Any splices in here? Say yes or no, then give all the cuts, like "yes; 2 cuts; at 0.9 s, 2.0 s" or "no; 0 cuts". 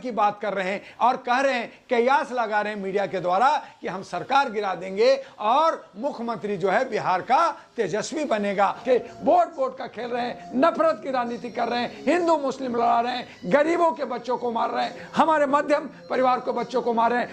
yes; 1 cut; at 8.8 s